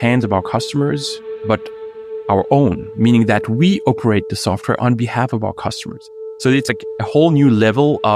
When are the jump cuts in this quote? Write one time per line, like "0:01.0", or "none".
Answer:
none

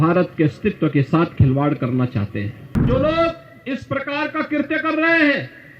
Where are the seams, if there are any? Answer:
0:02.8

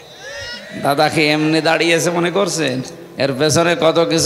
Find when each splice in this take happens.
0:03.0

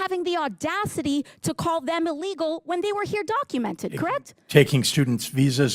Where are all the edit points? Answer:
none

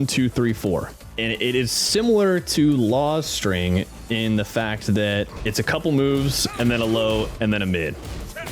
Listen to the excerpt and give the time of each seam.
0:05.3

